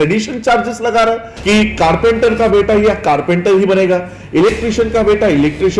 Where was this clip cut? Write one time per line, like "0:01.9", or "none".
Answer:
0:01.3